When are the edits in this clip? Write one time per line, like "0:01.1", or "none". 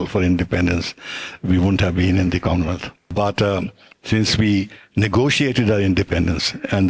none